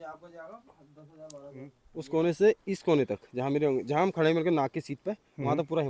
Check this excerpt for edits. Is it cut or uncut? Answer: cut